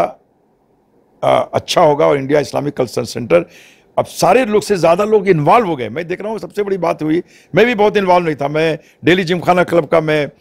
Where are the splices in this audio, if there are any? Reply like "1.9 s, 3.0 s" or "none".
none